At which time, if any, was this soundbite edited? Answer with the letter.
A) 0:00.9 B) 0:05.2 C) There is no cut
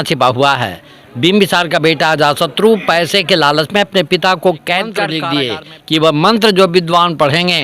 B